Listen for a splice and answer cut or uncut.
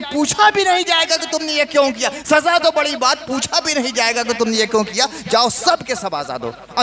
uncut